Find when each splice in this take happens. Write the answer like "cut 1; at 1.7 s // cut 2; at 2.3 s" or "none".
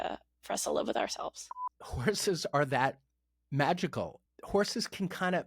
cut 1; at 1.6 s // cut 2; at 4.2 s